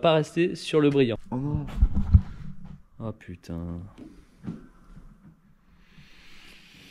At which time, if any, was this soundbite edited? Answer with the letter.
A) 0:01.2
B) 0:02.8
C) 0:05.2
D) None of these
A